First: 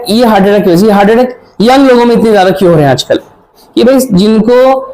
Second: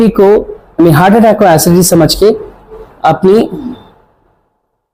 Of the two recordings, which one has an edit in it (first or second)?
first